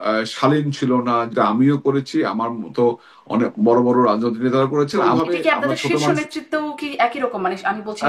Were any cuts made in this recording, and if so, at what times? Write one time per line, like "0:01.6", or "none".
0:01.3
0:05.0